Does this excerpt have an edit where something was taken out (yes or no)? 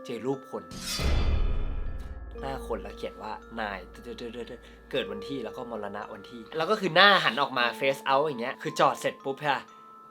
no